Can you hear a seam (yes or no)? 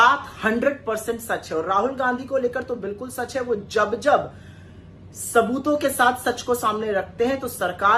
no